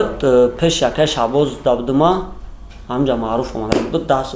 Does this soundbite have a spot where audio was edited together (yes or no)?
no